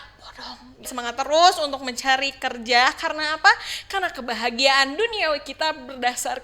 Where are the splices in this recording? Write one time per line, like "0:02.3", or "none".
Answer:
0:00.9